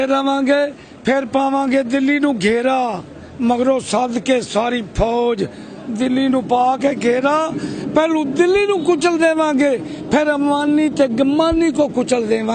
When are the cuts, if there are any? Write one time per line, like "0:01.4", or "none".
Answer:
none